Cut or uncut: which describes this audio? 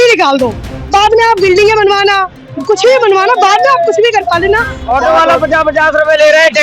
cut